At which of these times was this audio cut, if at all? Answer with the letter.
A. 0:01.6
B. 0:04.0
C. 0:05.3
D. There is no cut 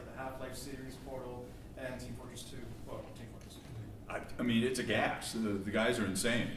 C